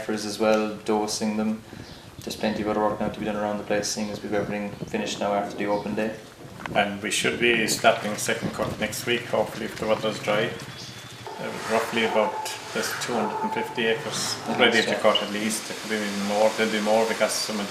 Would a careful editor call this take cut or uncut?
uncut